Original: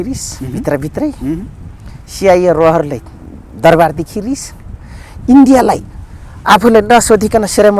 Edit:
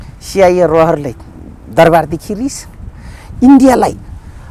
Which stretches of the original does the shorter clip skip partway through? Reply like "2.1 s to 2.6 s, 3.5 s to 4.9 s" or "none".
none